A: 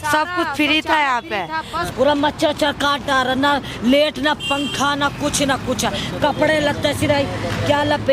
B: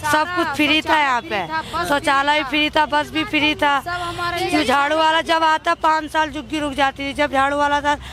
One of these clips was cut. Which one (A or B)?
A